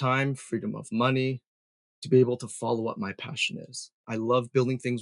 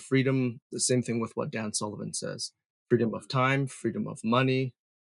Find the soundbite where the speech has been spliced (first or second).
first